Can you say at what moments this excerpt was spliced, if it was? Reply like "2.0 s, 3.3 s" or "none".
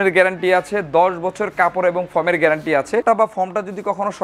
3.0 s